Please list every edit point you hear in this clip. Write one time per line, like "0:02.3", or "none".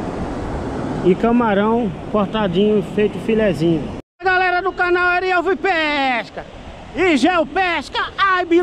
0:04.0